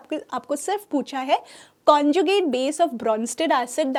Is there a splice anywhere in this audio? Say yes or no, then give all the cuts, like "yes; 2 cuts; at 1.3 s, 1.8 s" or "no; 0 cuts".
no; 0 cuts